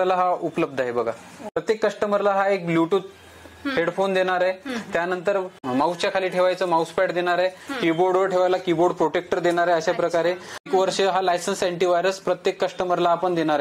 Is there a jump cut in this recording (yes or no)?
yes